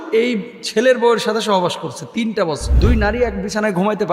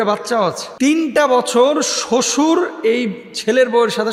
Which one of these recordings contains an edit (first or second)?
first